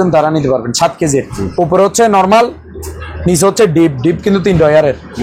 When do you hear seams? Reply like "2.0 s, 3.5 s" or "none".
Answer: 1.4 s